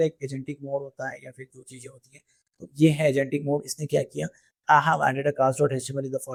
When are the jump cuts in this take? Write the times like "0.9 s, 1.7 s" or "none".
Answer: none